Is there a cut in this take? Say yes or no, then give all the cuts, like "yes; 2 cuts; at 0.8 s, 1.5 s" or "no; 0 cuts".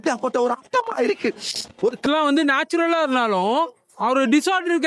yes; 1 cut; at 2.0 s